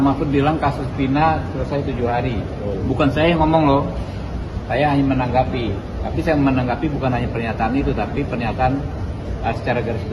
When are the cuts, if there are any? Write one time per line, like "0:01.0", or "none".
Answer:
none